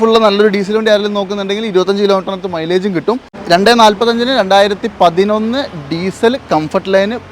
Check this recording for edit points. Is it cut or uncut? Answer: cut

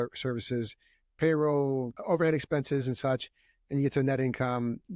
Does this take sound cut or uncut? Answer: cut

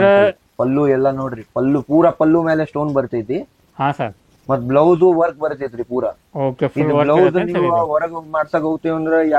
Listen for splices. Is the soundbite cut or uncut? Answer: uncut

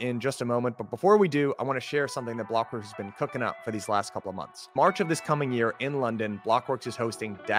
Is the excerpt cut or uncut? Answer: uncut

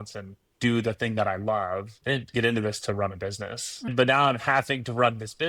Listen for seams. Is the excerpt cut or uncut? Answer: cut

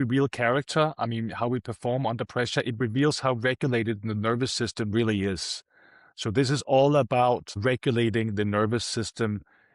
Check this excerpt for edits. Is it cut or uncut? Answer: uncut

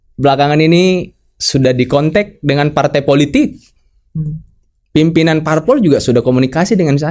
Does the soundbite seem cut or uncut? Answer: uncut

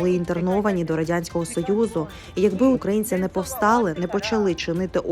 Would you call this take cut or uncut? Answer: cut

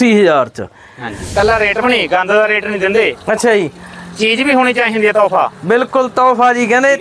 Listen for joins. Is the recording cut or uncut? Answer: cut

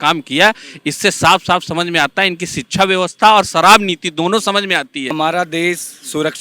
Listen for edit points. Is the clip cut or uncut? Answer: cut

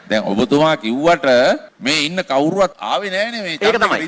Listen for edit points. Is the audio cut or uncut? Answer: cut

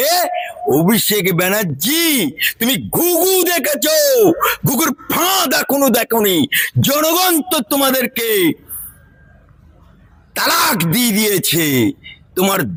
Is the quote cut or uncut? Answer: uncut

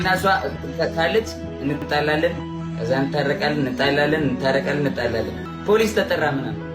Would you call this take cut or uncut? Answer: cut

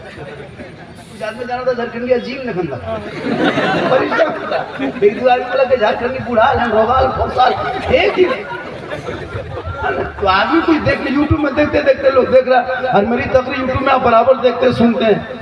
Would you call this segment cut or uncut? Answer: uncut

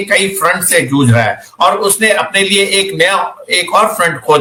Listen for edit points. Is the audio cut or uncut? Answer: uncut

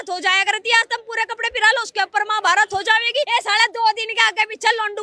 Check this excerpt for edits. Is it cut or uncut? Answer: cut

